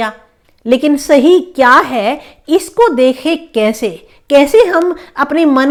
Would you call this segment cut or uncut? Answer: uncut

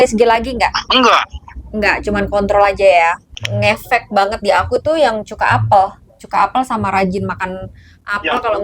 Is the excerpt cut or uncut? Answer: cut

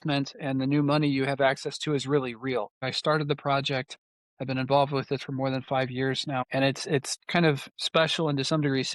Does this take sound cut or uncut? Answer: cut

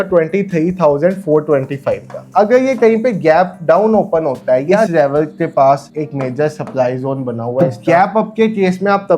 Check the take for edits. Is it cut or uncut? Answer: cut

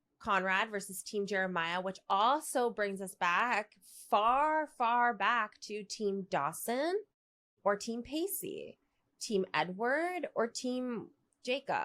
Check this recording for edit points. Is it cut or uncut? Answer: uncut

